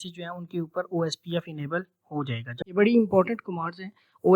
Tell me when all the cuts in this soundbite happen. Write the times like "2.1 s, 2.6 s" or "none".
2.6 s